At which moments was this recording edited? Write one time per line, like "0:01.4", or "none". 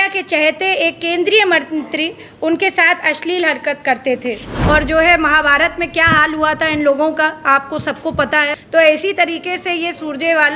0:04.5
0:08.5